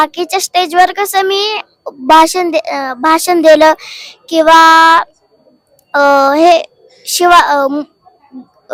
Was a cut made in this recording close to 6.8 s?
no; 0 cuts

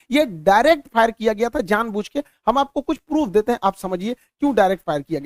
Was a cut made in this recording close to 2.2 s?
no; 0 cuts

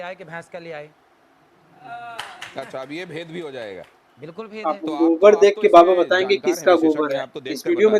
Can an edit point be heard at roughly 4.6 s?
yes; 1 cut; at 4.6 s

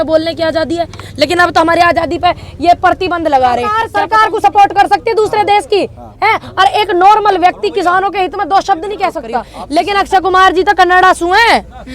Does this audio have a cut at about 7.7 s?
no; 2 cuts; at 3.8 s, 9.6 s

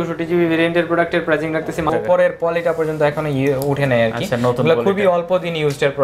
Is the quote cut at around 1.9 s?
yes; 1 cut; at 1.9 s

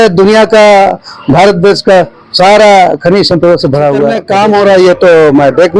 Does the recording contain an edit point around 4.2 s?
yes; 1 cut; at 4.2 s

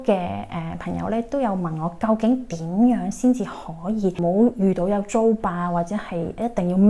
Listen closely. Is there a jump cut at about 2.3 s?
no; 1 cut; at 4.2 s

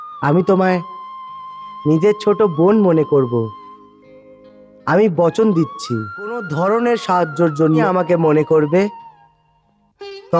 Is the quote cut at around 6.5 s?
yes; 2 cuts; at 6.5 s, 7.8 s

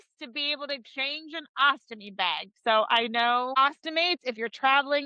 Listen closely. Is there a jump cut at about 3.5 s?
yes; 1 cut; at 3.5 s

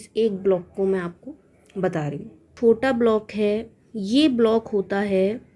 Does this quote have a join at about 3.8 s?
no; 1 cut; at 2.5 s

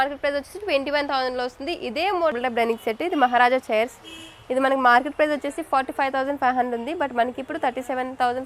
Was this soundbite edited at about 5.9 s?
no; 1 cut; at 2.3 s

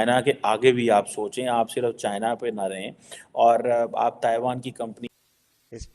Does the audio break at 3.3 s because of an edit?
no; 1 cut; at 5.0 s

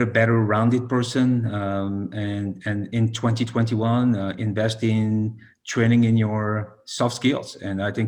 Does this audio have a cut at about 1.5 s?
no; 0 cuts

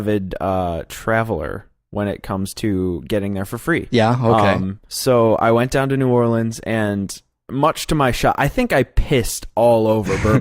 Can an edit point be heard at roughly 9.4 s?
no; 1 cut; at 4.4 s

